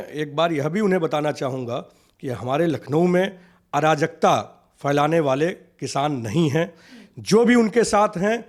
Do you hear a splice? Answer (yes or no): no